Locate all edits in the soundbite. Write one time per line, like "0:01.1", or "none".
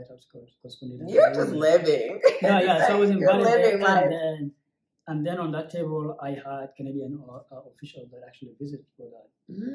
none